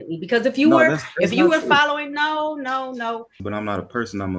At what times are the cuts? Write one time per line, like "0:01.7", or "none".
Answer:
0:03.4